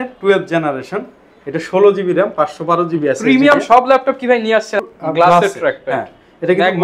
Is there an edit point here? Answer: yes; 1 cut; at 4.8 s

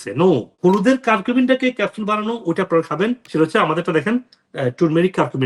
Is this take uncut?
yes; 0 cuts

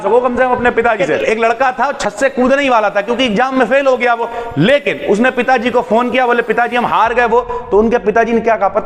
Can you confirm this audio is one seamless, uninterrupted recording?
no; 1 cut; at 1.1 s

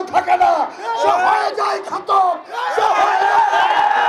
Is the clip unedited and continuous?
yes; 0 cuts

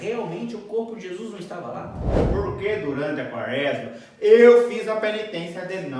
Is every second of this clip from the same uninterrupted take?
no; 1 cut; at 2.2 s

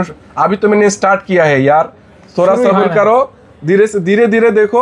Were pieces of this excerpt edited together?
no; 0 cuts

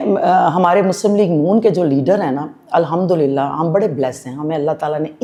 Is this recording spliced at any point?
no; 0 cuts

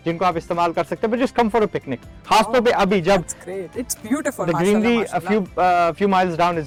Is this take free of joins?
yes; 0 cuts

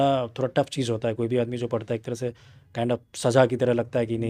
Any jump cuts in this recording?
no; 0 cuts

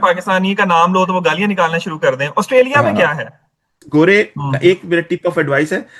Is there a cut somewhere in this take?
yes; 1 cut; at 3.8 s

